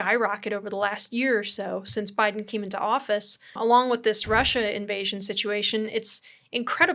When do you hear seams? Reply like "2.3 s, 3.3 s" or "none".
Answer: 3.5 s